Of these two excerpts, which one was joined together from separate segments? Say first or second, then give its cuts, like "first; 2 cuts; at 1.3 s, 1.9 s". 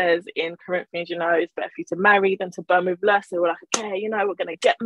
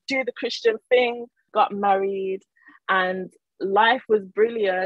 second; 1 cut; at 1.4 s